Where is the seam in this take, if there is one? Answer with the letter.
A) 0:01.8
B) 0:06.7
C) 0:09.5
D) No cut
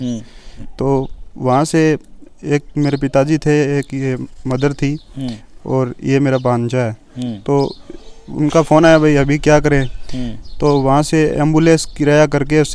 D